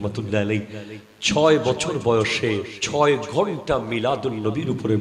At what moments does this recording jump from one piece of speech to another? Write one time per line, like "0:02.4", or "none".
0:02.8